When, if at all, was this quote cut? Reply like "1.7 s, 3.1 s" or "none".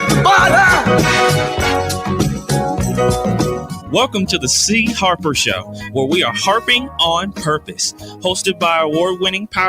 4.4 s